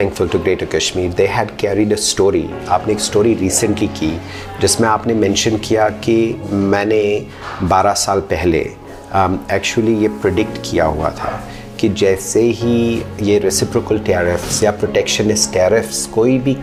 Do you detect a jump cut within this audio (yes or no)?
no